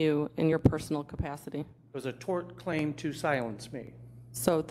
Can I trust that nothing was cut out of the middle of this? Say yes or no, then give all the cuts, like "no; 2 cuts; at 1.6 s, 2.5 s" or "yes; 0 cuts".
yes; 0 cuts